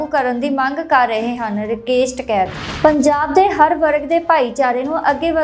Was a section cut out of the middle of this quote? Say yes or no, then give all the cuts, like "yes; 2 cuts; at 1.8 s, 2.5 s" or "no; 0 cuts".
yes; 1 cut; at 2.7 s